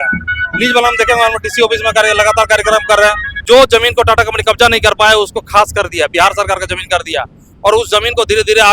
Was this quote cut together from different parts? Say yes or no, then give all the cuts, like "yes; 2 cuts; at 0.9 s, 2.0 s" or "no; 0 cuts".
yes; 1 cut; at 3.3 s